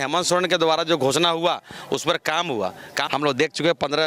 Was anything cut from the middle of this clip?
yes; 1 cut; at 2.9 s

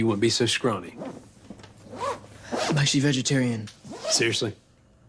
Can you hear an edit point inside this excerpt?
no; 0 cuts

